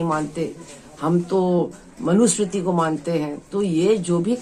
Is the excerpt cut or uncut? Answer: uncut